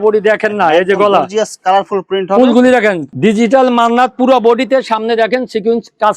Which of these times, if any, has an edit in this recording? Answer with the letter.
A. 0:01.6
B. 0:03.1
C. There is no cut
B